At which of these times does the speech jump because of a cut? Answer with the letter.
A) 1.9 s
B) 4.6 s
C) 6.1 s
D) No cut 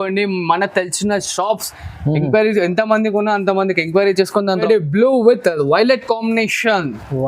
B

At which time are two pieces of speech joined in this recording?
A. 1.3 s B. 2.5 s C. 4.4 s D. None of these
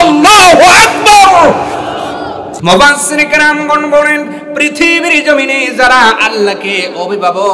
B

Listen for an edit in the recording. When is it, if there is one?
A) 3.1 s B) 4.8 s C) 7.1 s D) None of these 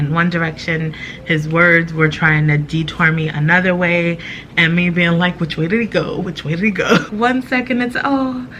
C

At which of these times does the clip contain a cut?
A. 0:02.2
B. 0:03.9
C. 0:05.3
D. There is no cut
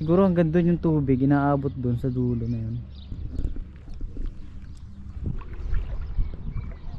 C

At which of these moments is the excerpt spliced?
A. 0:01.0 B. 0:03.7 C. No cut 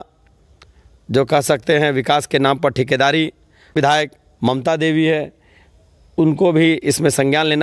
B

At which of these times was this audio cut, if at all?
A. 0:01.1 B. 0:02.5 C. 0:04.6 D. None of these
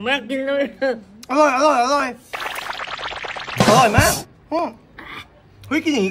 D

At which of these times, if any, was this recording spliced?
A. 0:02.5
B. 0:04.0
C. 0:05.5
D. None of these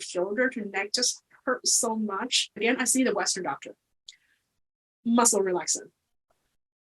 A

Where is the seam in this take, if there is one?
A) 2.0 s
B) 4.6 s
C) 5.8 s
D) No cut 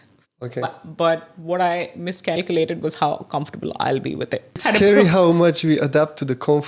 B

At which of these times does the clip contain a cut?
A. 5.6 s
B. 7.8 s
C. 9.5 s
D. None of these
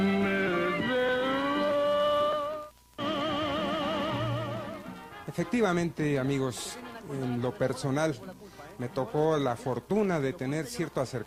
D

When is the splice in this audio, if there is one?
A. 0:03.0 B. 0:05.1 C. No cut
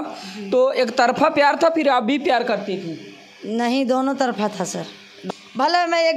B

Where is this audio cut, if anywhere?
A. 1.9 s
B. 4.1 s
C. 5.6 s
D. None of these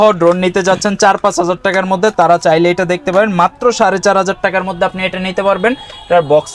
D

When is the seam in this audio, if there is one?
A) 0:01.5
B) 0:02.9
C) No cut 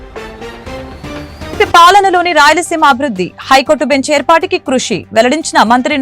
A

